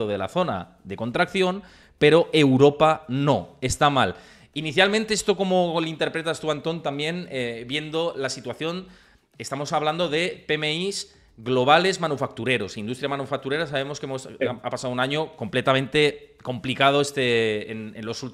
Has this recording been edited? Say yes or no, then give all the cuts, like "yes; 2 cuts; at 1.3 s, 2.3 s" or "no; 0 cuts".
no; 0 cuts